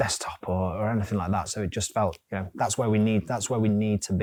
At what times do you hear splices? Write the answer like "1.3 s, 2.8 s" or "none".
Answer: none